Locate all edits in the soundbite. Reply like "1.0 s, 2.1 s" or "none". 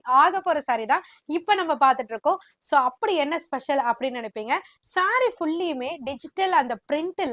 none